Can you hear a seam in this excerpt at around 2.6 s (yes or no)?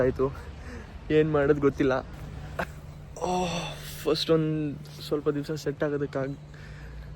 yes